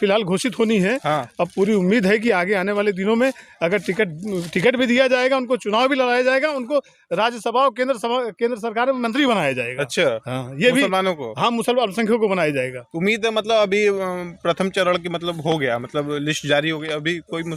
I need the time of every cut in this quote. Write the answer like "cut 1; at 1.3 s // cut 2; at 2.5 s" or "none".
none